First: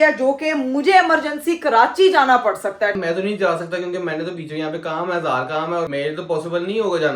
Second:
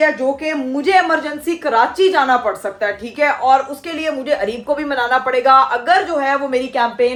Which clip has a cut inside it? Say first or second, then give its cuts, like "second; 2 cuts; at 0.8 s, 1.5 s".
first; 2 cuts; at 3.0 s, 5.9 s